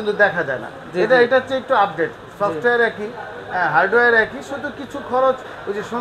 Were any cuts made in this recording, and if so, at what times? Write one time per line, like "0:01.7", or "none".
none